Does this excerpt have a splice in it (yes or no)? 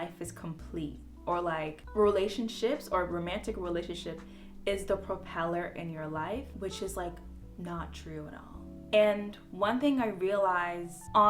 no